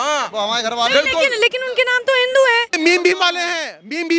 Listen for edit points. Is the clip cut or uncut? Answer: cut